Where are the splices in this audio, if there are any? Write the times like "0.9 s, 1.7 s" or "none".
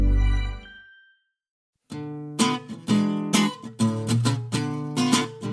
1.8 s

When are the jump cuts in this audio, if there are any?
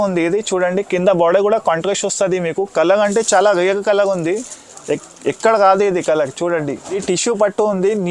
6.9 s

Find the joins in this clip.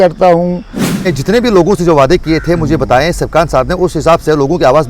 1.1 s

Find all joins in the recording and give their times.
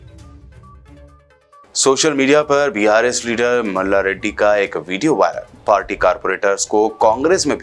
0.9 s

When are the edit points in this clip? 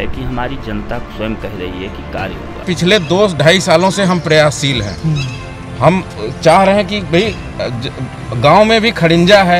2.7 s

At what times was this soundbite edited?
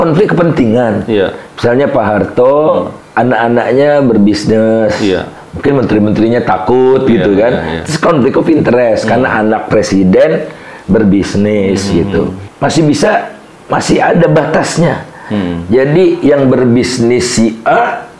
3.0 s, 12.4 s

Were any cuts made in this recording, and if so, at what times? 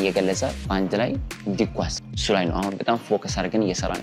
2.1 s

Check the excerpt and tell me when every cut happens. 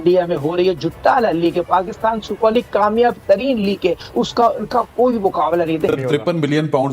5.9 s

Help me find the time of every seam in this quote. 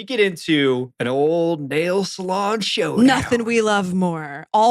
0.9 s

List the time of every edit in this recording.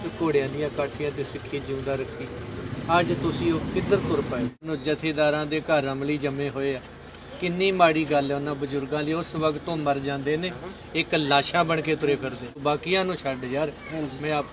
4.6 s, 12.5 s

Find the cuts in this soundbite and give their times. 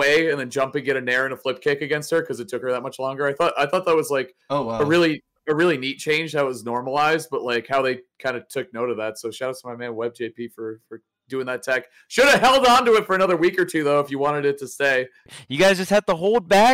15.3 s

